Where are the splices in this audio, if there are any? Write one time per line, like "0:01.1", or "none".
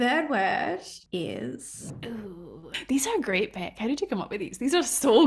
0:00.9
0:01.9